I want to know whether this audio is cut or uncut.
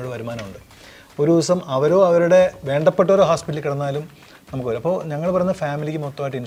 uncut